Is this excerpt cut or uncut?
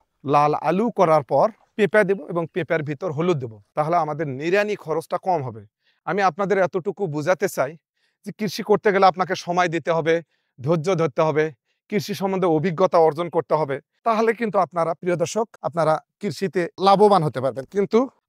uncut